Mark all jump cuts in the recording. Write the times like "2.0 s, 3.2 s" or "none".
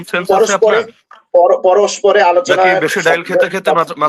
none